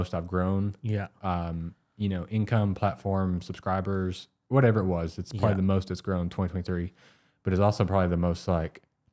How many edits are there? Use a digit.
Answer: 0